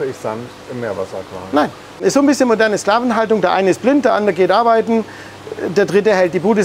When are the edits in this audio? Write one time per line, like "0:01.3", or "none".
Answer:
0:02.0